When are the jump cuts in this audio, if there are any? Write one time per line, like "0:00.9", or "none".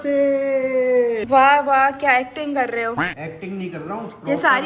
0:01.2